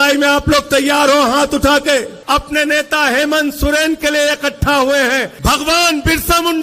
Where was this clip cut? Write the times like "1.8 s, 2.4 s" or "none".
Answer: 2.2 s, 5.3 s